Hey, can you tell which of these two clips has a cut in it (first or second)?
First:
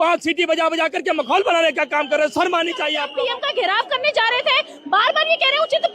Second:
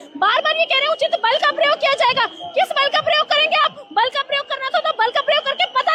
first